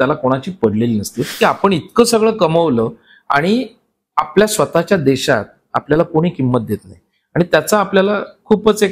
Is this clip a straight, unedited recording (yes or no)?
no